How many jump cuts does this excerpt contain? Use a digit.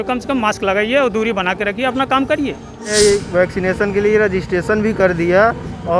1